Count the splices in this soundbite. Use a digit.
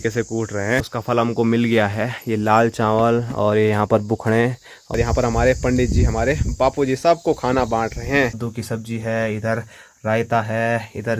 3